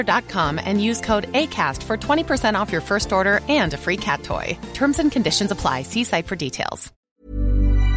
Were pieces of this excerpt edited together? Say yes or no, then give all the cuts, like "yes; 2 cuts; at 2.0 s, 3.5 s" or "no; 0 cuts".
yes; 1 cut; at 6.9 s